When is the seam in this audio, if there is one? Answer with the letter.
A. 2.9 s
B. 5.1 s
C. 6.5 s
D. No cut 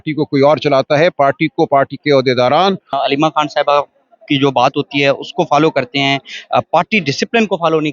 A